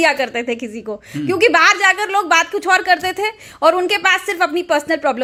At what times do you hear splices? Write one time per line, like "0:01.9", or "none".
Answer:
none